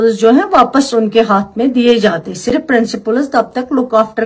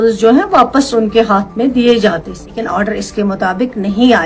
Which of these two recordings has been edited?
second; 1 cut; at 2.5 s

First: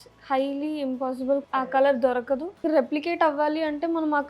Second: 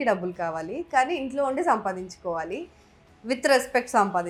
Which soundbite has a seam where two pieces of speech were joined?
first; 2 cuts; at 1.4 s, 2.6 s

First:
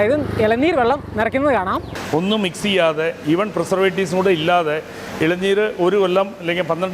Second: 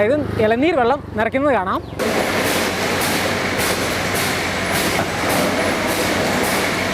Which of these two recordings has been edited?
first; 1 cut; at 1.9 s

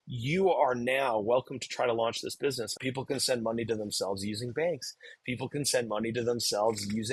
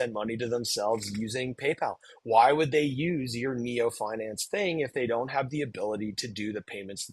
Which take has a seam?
first; 1 cut; at 2.8 s

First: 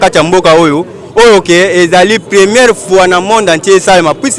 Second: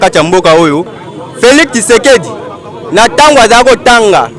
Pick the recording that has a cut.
second; 1 cut; at 0.9 s

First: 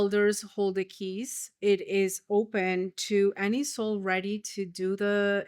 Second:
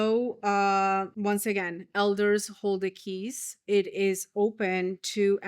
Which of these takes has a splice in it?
second; 1 cut; at 1.1 s

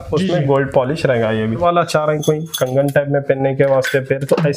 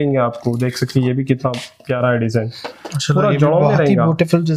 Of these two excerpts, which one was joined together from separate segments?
first; 1 cut; at 1.6 s

